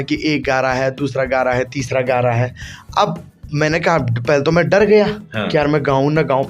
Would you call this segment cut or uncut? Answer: uncut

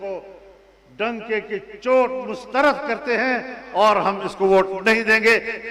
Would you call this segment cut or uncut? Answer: uncut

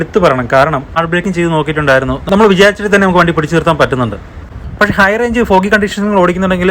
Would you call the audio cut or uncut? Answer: cut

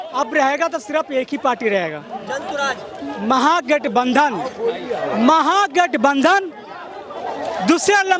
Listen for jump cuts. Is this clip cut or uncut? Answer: uncut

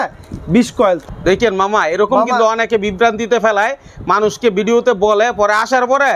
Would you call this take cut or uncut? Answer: cut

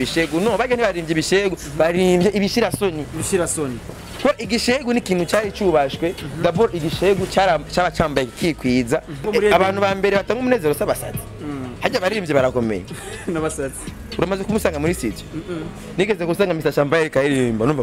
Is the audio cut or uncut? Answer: cut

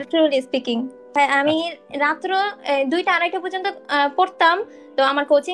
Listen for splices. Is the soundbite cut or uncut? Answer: cut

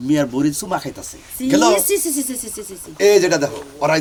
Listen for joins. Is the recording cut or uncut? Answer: uncut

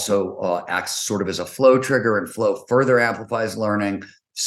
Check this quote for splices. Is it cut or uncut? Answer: uncut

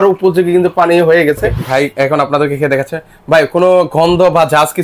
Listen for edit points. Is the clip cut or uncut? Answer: cut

